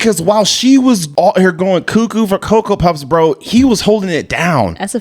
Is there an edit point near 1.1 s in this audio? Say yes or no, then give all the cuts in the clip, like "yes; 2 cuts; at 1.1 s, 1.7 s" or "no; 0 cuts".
yes; 1 cut; at 1.1 s